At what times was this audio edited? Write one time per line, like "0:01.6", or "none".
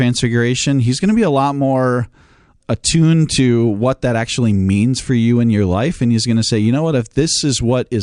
none